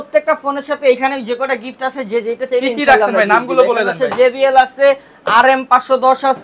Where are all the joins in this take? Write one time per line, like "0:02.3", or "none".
none